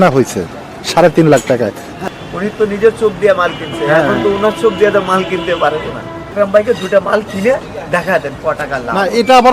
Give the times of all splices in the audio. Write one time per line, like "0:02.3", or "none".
0:01.9
0:06.3